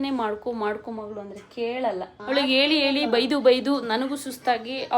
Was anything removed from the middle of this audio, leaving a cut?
yes; 1 cut; at 2.1 s

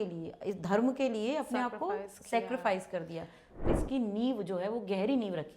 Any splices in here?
yes; 1 cut; at 3.7 s

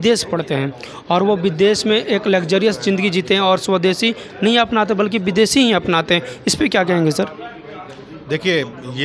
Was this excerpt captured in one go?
yes; 0 cuts

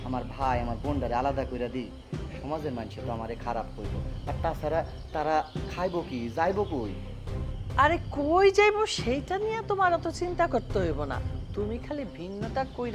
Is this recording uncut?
yes; 0 cuts

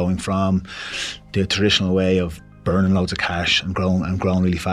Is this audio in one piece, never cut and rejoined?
yes; 0 cuts

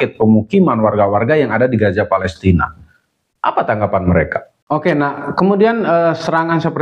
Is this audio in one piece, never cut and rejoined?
no; 1 cut; at 4.5 s

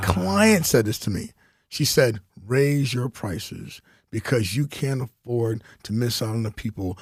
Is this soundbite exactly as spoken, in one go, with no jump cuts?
yes; 0 cuts

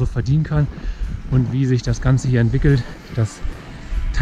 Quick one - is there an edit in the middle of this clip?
no; 0 cuts

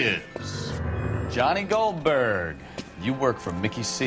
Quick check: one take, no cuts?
yes; 0 cuts

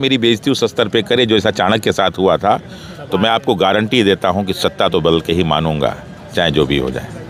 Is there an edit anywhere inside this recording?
no; 0 cuts

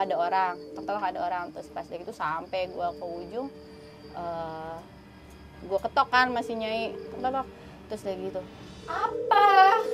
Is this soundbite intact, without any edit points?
yes; 0 cuts

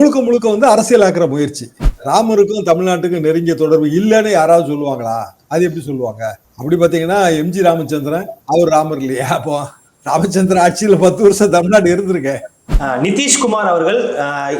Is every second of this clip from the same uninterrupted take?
no; 2 cuts; at 1.9 s, 12.6 s

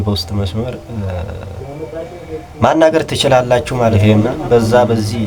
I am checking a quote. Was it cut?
yes; 1 cut; at 4.0 s

